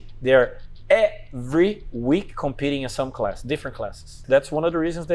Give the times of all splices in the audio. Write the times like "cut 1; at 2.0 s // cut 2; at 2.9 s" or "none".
cut 1; at 4.2 s